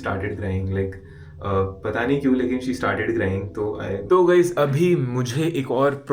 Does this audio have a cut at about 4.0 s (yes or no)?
yes